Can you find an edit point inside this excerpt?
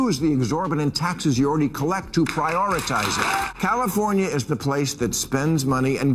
yes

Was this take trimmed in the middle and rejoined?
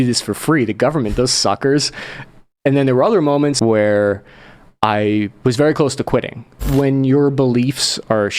yes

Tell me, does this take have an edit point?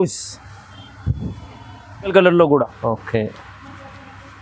yes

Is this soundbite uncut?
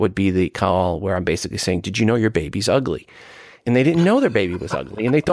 no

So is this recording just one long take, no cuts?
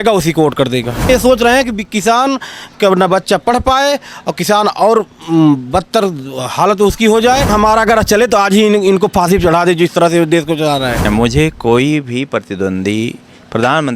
no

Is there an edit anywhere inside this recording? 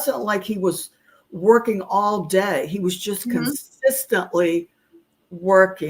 no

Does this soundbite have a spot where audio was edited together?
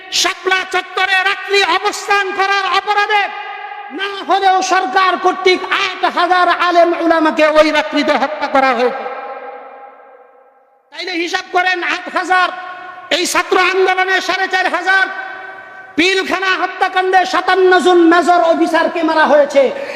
no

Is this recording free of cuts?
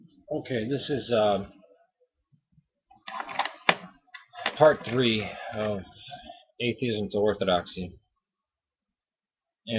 yes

